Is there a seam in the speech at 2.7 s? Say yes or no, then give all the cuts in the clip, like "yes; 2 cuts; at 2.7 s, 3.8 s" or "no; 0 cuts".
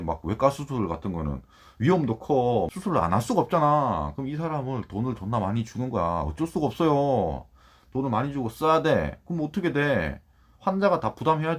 yes; 1 cut; at 2.7 s